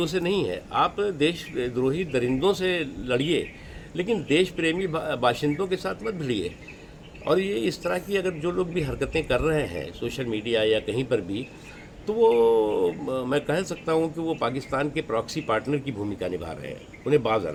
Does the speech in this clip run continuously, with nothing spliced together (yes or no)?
yes